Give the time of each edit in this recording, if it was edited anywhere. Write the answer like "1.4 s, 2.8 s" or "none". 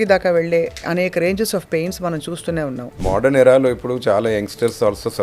2.9 s